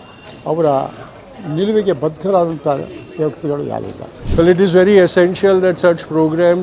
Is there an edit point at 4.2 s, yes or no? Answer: yes